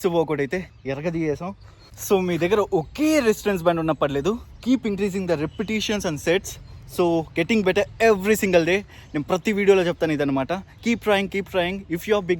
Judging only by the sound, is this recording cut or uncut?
cut